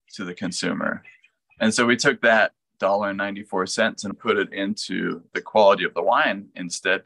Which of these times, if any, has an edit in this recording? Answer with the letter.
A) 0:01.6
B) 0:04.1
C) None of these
B